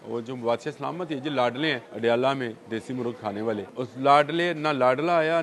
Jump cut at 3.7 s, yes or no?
yes